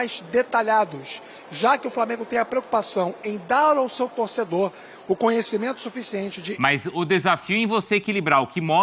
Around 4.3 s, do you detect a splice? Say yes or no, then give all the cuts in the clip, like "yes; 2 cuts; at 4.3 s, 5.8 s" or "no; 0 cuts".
no; 1 cut; at 6.4 s